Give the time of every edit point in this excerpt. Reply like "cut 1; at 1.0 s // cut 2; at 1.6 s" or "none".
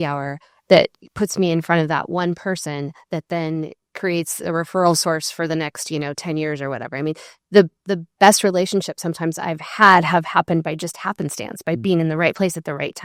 none

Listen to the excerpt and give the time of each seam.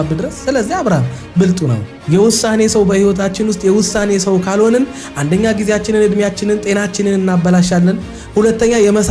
cut 1; at 1.9 s

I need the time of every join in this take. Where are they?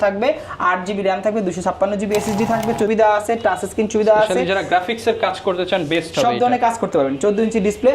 cut 1; at 2.9 s

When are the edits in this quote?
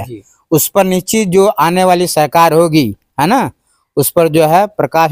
none

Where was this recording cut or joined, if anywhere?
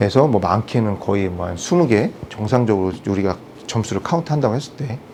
none

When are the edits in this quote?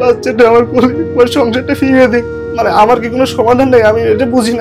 cut 1; at 2.4 s

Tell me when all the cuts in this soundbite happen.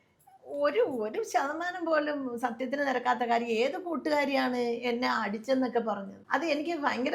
cut 1; at 6.1 s

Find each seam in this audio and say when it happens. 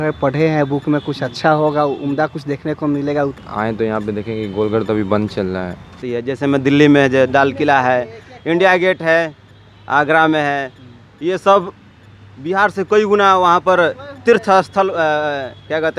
cut 1; at 3.4 s // cut 2; at 5.9 s

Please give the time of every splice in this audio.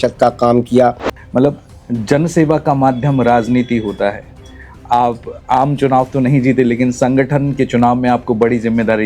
cut 1; at 1.1 s

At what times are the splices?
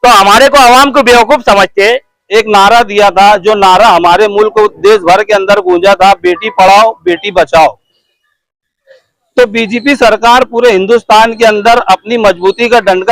cut 1; at 2.1 s

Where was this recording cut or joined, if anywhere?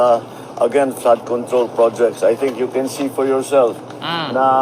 cut 1; at 3.7 s

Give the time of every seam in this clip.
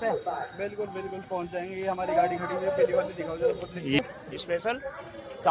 cut 1; at 4.0 s

